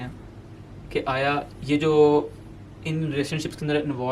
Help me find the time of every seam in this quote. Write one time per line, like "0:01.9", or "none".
0:01.5